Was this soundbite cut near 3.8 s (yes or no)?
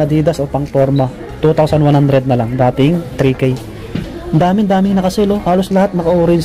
no